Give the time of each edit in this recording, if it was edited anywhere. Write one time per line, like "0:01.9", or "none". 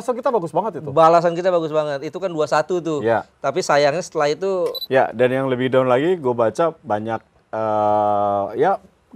0:04.8